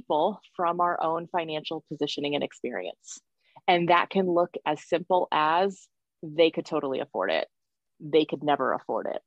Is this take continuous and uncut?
yes; 0 cuts

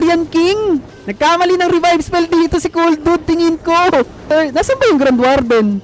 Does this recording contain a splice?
yes; 2 cuts; at 1.0 s, 4.2 s

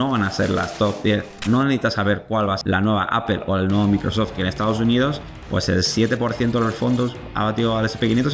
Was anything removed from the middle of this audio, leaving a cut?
yes; 3 cuts; at 1.4 s, 2.6 s, 4.4 s

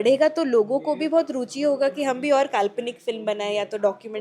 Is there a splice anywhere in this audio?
no; 0 cuts

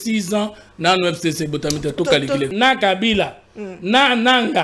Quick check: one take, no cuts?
no; 1 cut; at 2.5 s

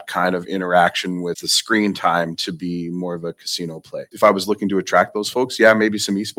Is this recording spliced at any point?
yes; 2 cuts; at 1.5 s, 4.0 s

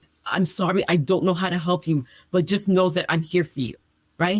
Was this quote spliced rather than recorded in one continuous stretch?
no; 0 cuts

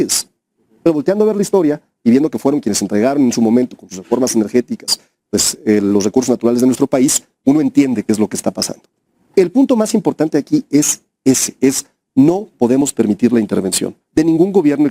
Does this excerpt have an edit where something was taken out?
no; 0 cuts

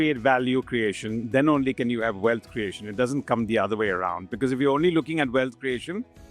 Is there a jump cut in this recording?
no; 0 cuts

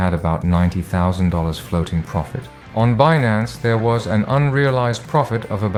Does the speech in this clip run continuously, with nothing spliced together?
yes; 0 cuts

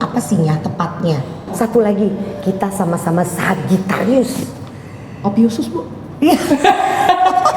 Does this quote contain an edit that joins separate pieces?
yes; 1 cut; at 1.4 s

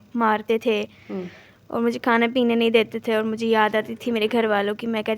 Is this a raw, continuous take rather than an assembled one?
yes; 0 cuts

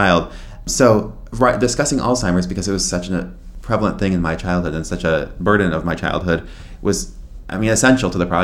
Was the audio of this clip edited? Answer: no; 0 cuts

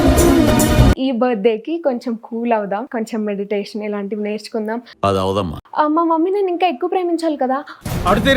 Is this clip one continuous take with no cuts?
no; 2 cuts; at 1.0 s, 5.6 s

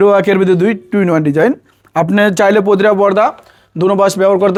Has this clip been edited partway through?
no; 0 cuts

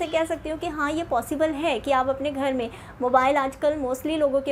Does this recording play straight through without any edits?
yes; 0 cuts

